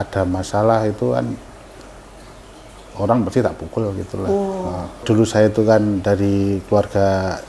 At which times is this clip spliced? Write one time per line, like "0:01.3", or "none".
0:05.0